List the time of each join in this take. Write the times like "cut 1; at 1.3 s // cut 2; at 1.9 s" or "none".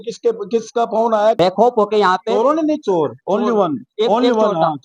cut 1; at 1.4 s

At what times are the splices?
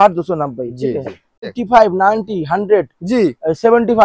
cut 1; at 1.6 s

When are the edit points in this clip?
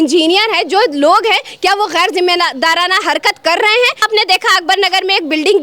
cut 1; at 4.0 s

